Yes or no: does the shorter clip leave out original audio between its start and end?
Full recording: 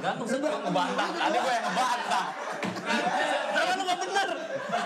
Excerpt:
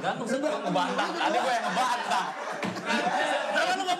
no